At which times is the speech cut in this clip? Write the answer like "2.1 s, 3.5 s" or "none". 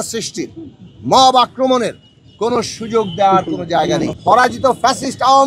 4.2 s